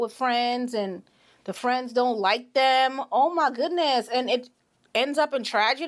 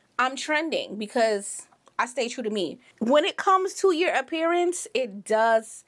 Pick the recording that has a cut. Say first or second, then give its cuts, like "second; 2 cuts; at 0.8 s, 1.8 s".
second; 1 cut; at 2.8 s